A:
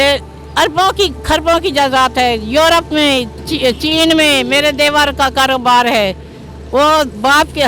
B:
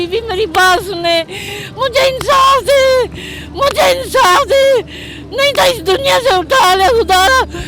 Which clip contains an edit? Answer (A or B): A